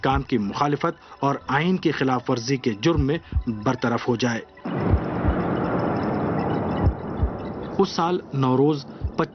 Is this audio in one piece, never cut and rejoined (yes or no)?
yes